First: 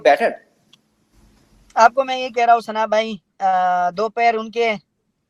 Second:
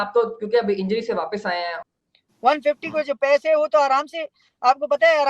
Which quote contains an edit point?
second; 1 cut; at 1.8 s

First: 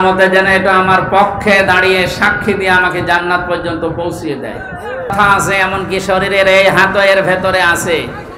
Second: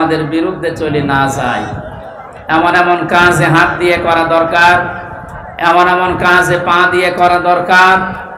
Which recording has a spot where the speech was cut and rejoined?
first; 1 cut; at 5.1 s

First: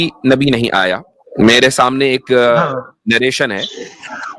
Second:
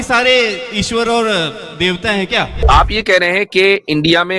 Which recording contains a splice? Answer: second; 1 cut; at 2.6 s

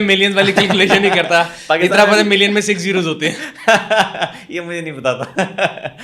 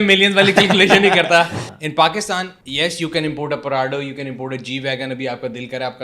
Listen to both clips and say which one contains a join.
second; 2 cuts; at 1.6 s, 2.6 s

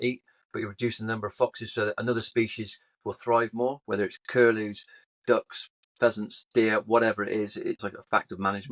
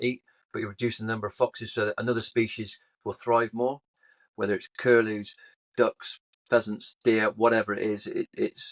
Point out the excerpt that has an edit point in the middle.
first; 2 cuts; at 3.8 s, 7.8 s

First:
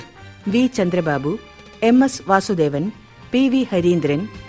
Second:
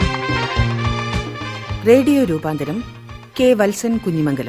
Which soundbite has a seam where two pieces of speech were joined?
second; 1 cut; at 1.7 s

